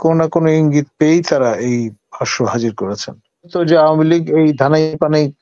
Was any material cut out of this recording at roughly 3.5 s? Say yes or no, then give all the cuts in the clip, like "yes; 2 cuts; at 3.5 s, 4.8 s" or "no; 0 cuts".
yes; 1 cut; at 3.5 s